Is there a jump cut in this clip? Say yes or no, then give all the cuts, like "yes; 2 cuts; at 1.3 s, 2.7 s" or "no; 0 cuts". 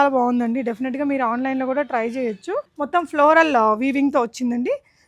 yes; 1 cut; at 2.7 s